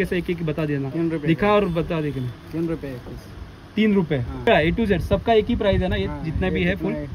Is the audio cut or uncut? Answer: cut